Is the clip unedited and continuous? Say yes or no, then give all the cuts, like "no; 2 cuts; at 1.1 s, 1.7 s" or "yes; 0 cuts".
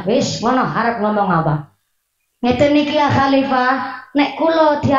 yes; 0 cuts